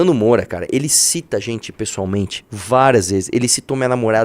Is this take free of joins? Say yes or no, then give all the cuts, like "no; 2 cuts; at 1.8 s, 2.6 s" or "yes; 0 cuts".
yes; 0 cuts